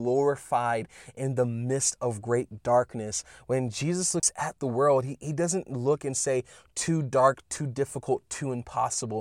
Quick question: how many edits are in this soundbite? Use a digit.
1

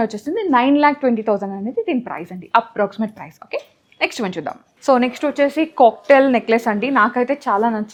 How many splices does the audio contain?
0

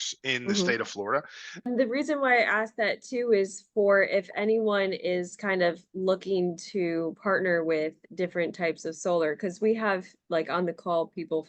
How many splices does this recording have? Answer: 1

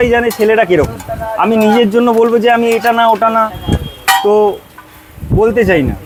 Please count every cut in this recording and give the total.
0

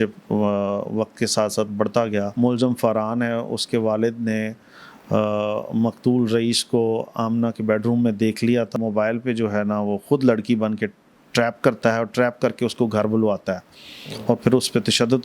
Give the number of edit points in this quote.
2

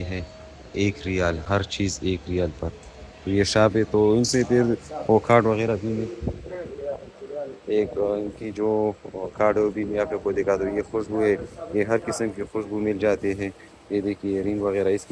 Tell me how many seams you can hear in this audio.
0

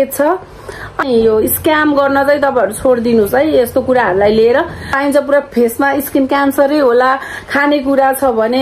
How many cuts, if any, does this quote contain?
2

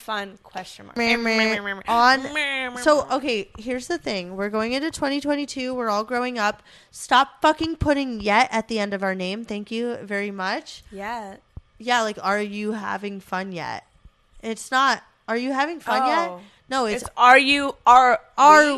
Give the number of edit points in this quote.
1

